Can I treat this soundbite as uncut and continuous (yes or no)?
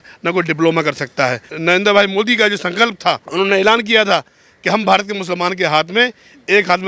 no